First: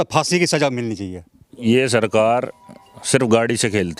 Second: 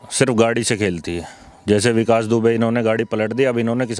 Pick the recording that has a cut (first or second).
first